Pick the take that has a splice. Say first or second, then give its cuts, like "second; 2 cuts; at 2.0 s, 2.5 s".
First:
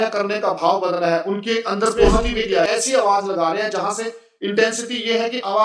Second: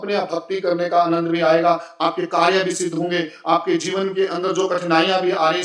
first; 1 cut; at 2.7 s